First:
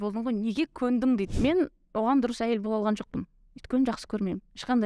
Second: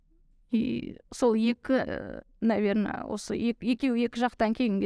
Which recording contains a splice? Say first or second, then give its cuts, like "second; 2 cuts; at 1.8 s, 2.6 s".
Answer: first; 1 cut; at 1.3 s